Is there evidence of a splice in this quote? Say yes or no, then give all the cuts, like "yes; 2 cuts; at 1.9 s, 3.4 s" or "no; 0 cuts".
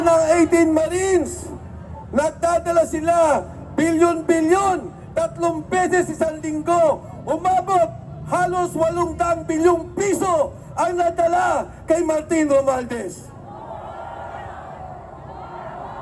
no; 0 cuts